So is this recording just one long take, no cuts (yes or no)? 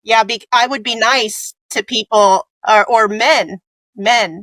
yes